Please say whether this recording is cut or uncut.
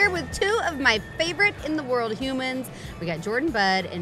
uncut